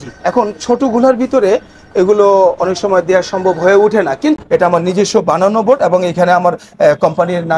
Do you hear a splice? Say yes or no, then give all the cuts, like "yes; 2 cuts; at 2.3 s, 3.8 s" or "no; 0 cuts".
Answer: yes; 1 cut; at 4.4 s